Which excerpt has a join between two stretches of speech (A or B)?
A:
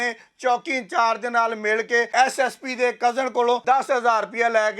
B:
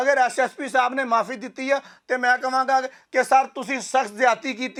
A